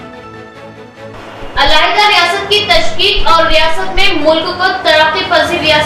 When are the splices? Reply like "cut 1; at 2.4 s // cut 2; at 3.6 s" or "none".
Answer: none